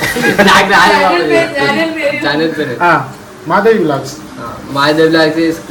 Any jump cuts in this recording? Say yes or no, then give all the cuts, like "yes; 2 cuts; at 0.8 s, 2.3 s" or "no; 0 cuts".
no; 0 cuts